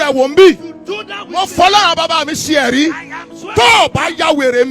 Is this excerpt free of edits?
yes; 0 cuts

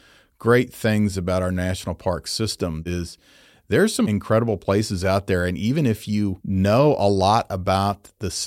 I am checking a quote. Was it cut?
yes; 2 cuts; at 2.6 s, 6.4 s

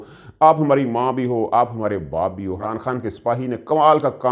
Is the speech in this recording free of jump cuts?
no; 1 cut; at 2.5 s

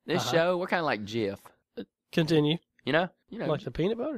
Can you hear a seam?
yes; 1 cut; at 3.2 s

